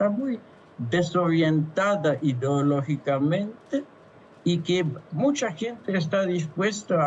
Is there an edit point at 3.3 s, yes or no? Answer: no